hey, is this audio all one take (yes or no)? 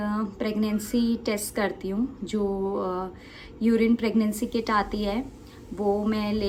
yes